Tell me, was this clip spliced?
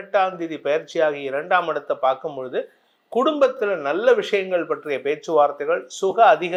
no; 0 cuts

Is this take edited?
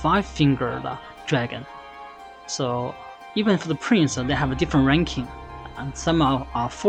no; 0 cuts

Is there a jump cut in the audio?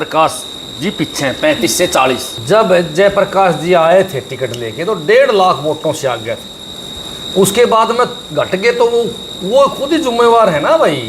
yes; 1 cut; at 2.3 s

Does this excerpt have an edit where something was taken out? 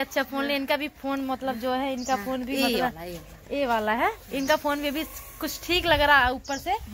no; 0 cuts

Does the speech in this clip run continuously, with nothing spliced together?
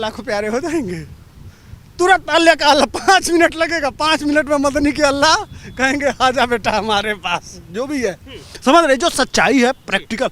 yes; 0 cuts

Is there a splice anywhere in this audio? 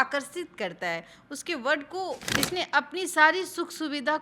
yes; 1 cut; at 2.3 s

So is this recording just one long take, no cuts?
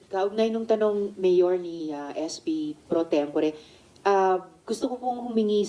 yes; 0 cuts

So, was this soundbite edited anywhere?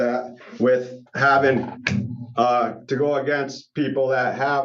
no; 0 cuts

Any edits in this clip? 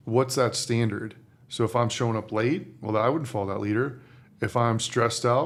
no; 0 cuts

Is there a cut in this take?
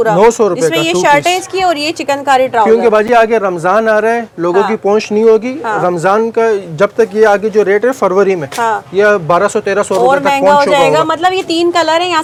no; 0 cuts

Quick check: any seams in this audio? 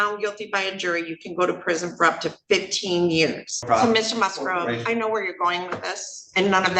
yes; 1 cut; at 3.6 s

